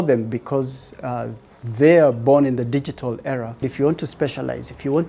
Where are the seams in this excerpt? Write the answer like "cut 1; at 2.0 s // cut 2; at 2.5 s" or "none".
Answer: cut 1; at 3.7 s

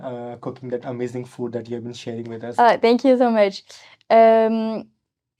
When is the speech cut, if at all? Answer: none

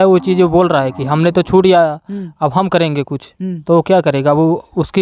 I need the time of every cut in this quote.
none

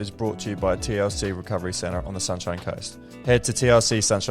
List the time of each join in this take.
cut 1; at 3.0 s

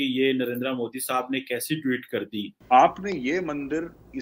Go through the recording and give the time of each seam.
cut 1; at 2.6 s

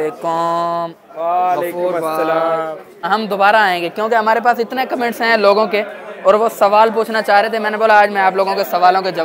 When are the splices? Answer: none

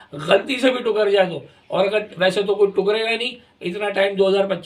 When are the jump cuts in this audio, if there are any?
none

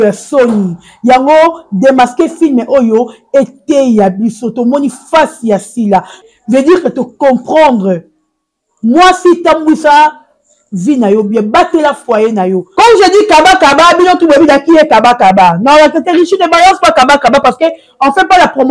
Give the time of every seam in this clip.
cut 1; at 6.2 s // cut 2; at 12.7 s

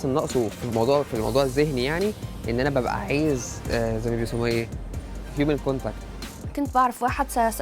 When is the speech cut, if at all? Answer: cut 1; at 6.0 s

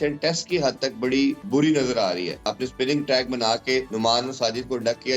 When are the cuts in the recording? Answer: cut 1; at 1.4 s // cut 2; at 2.5 s // cut 3; at 3.9 s

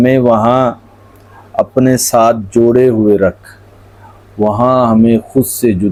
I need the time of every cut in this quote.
none

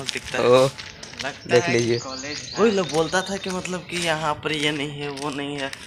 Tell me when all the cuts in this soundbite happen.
none

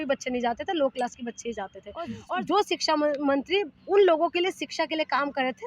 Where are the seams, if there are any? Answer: cut 1; at 2.2 s

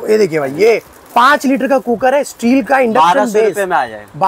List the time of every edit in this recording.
none

